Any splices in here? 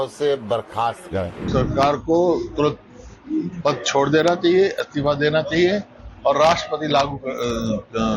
yes; 1 cut; at 1.4 s

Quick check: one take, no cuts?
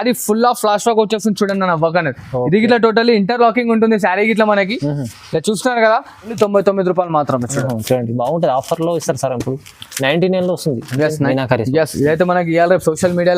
no; 2 cuts; at 6.3 s, 11.1 s

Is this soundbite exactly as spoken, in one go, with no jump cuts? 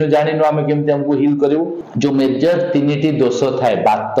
no; 1 cut; at 1.8 s

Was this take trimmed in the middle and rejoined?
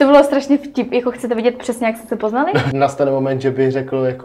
yes; 1 cut; at 2.7 s

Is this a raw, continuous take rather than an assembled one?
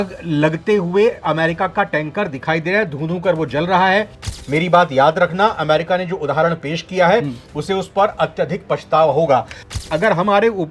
no; 2 cuts; at 4.3 s, 9.7 s

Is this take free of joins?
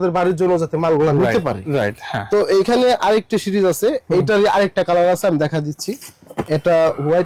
yes; 0 cuts

